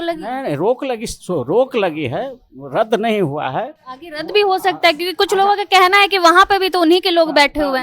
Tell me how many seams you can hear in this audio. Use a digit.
0